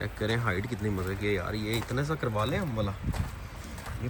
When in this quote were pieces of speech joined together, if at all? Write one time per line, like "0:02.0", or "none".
none